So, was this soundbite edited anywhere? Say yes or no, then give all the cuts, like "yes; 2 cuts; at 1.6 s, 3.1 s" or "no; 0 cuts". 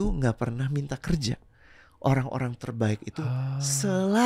no; 0 cuts